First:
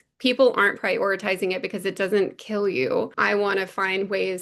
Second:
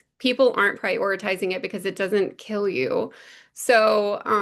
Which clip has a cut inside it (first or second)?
first